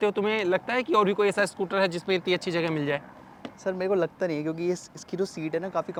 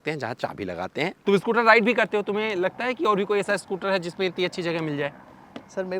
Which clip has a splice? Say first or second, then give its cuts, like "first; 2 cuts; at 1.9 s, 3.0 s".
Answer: second; 1 cut; at 1.1 s